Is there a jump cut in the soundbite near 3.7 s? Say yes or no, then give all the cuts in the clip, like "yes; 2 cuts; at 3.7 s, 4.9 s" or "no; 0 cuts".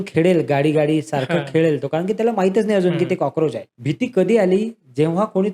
yes; 1 cut; at 3.7 s